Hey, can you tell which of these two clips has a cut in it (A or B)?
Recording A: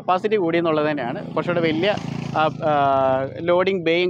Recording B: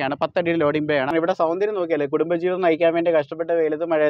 B